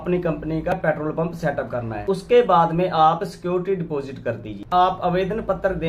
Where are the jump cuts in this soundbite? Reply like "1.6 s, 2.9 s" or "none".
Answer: 4.7 s

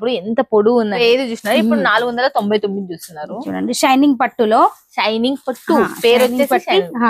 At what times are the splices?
1.0 s

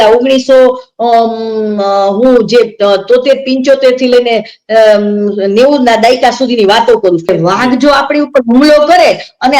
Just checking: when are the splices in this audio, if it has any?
7.3 s

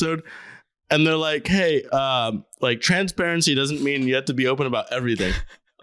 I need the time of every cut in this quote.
none

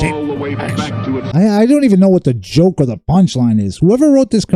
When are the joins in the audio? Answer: 1.3 s

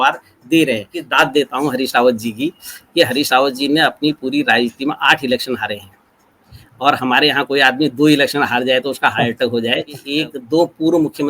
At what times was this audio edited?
1.0 s, 10.0 s

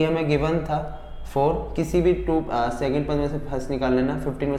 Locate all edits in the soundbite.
none

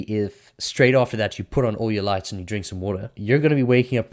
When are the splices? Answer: 3.1 s

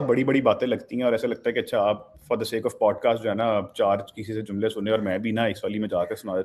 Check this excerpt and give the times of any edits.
none

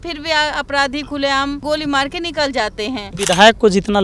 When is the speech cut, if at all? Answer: 1.6 s, 3.1 s

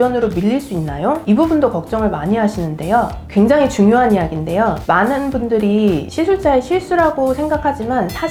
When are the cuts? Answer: none

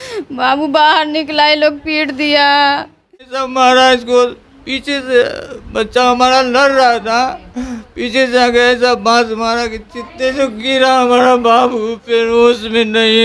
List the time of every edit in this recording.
3.4 s

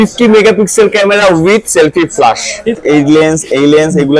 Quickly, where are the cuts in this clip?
2.8 s

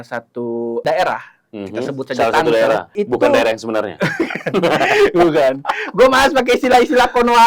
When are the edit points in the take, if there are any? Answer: 0.8 s, 2.9 s

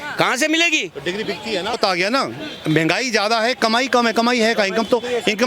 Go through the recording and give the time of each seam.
1.7 s

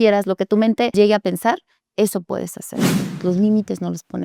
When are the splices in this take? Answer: 0.9 s, 3.0 s

